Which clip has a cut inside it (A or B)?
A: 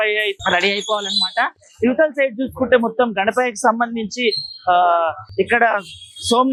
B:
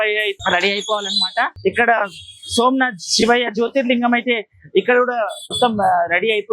B